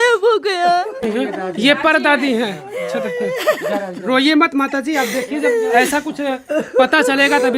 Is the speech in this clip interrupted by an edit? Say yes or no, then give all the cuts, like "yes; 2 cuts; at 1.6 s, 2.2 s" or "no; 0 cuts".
yes; 1 cut; at 1.0 s